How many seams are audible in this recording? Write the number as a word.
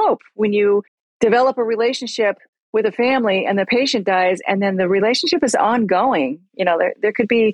one